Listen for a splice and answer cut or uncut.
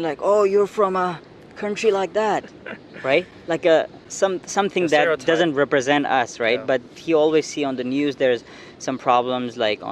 uncut